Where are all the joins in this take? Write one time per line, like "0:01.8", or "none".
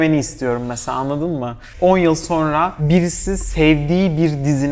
0:01.6
0:02.8